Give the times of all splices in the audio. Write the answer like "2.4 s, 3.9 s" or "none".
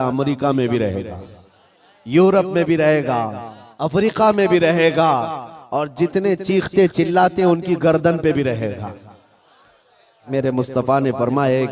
10.2 s